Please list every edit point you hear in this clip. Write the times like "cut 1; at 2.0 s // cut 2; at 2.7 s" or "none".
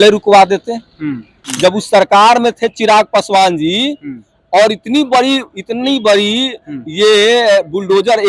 cut 1; at 1.4 s